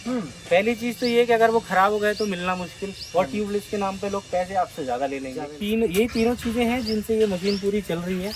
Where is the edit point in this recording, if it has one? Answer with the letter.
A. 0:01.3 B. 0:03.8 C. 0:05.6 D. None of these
C